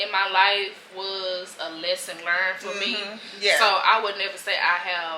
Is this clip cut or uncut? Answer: uncut